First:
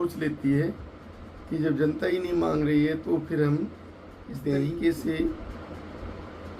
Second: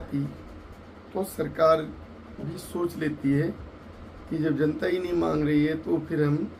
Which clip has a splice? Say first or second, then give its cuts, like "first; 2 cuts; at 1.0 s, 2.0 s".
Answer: first; 1 cut; at 4.7 s